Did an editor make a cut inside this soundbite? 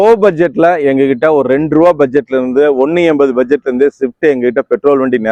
no; 0 cuts

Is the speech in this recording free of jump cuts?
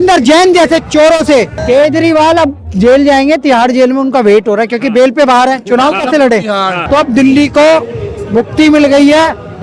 no; 2 cuts; at 1.6 s, 6.7 s

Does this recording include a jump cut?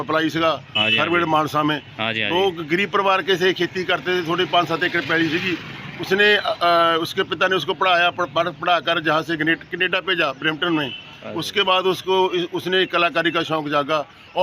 no; 0 cuts

